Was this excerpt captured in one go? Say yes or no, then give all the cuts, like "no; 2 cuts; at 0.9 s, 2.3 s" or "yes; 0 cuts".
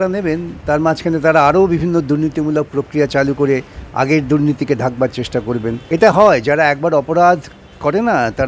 no; 1 cut; at 5.8 s